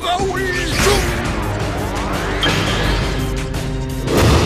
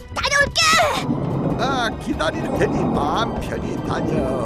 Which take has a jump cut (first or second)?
second